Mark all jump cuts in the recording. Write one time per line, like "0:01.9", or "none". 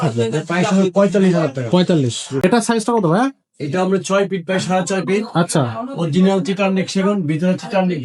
0:02.2